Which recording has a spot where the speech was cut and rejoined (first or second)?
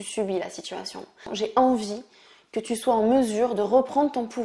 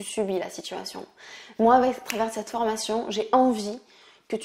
first